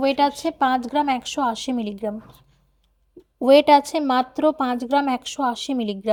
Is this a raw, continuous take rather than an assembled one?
yes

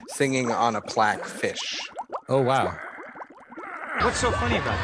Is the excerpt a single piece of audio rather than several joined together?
no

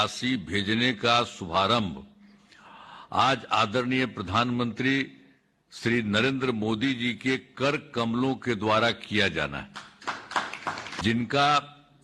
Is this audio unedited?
no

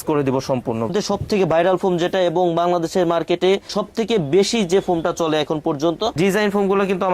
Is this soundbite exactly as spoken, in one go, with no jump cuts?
no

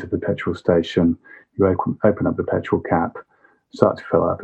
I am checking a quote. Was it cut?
no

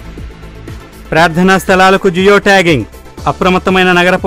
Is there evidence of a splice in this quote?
yes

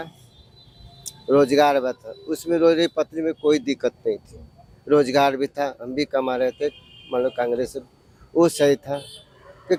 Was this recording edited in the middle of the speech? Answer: no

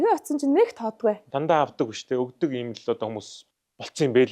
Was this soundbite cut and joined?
yes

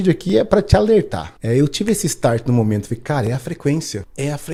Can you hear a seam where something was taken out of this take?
no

